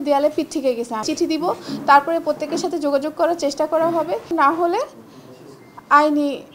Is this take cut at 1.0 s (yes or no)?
yes